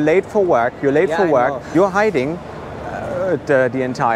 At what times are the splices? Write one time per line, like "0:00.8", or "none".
0:01.6